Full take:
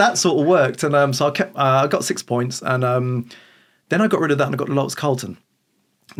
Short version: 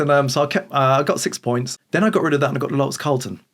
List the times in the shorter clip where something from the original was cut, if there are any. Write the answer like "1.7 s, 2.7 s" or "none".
1.7 s